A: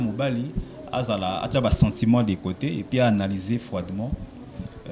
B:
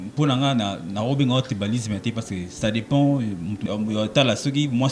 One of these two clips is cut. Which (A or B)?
B